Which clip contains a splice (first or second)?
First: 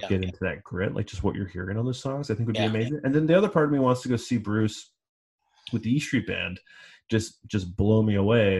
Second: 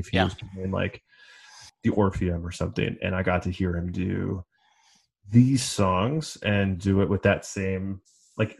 second